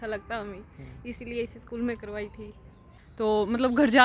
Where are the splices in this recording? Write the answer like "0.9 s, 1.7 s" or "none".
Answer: 2.9 s